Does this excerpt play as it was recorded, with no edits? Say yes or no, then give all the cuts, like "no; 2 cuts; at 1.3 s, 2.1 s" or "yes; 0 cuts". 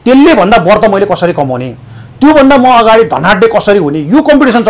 yes; 0 cuts